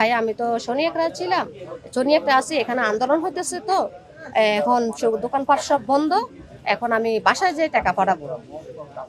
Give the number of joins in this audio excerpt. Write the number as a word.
zero